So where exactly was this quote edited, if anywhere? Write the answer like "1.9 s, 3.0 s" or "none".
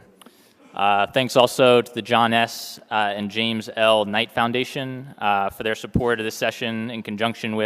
1.9 s